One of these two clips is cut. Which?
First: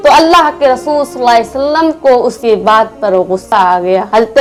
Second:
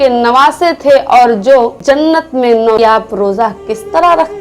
second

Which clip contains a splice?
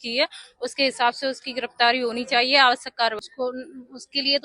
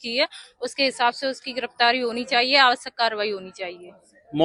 first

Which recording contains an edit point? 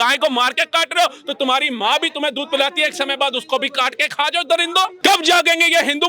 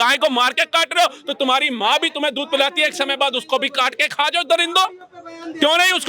first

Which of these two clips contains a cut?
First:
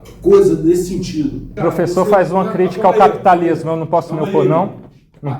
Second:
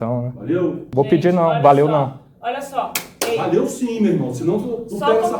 first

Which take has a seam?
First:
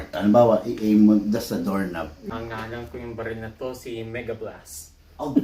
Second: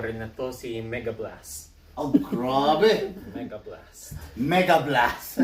first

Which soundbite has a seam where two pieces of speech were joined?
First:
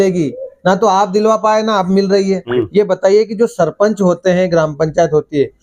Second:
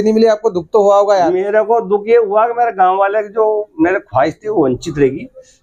first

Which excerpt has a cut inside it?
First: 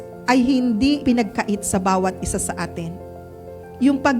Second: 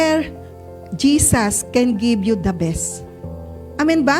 first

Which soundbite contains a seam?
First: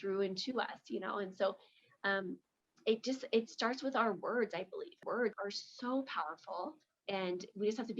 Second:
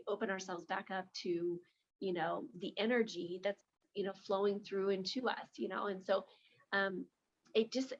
first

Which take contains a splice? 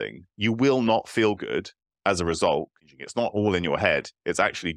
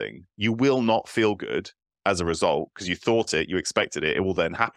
first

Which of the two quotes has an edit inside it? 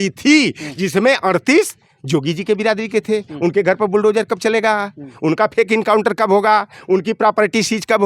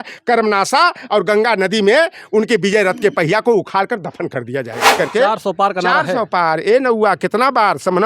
second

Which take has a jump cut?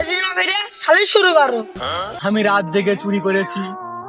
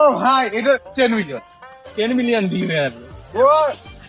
first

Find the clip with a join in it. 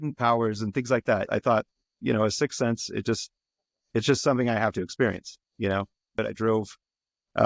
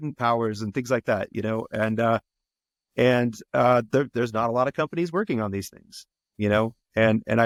first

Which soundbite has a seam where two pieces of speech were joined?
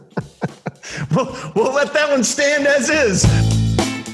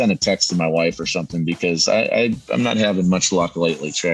first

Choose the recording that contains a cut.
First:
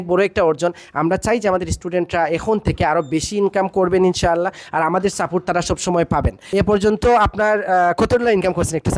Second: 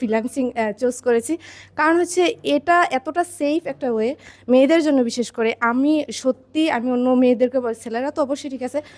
first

